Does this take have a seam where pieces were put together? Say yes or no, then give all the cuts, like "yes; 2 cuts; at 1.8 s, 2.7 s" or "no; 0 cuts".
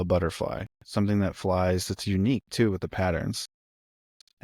no; 0 cuts